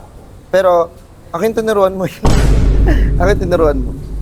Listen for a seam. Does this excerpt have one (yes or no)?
no